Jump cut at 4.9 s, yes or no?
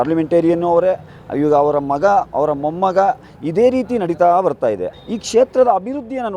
yes